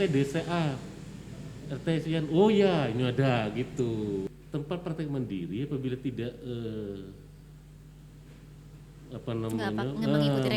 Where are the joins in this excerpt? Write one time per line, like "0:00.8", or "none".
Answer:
0:04.3